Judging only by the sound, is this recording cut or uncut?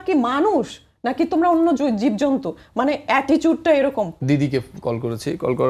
cut